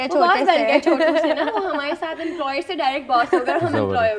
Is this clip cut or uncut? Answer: uncut